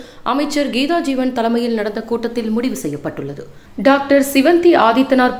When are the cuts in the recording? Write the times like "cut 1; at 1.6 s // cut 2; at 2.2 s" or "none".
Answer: cut 1; at 3.8 s